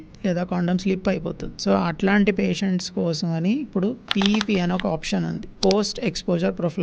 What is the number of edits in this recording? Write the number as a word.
two